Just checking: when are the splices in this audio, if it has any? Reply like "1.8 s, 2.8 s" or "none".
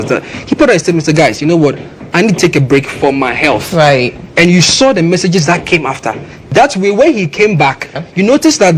6.3 s, 7.9 s